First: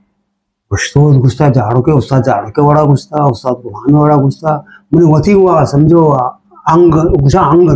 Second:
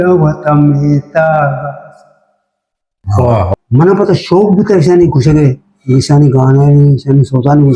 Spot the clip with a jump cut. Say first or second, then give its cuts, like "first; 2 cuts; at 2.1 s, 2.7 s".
second; 1 cut; at 3.6 s